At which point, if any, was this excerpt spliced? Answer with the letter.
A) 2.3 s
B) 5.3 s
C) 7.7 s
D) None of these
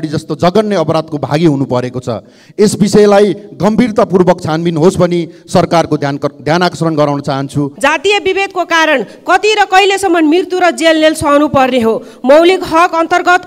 C